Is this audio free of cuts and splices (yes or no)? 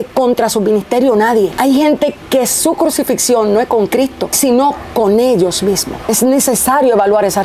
no